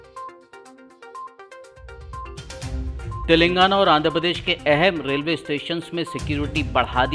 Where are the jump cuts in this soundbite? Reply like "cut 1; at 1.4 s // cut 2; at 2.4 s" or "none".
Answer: cut 1; at 2.9 s